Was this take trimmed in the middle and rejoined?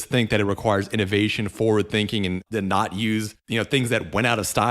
yes; 2 cuts; at 2.4 s, 3.4 s

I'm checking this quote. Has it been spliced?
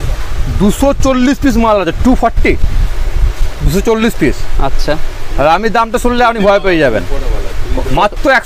no; 0 cuts

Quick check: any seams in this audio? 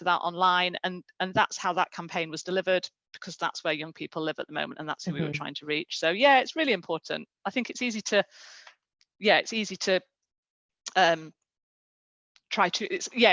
no; 0 cuts

